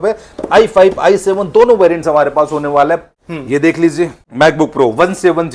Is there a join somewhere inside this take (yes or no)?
yes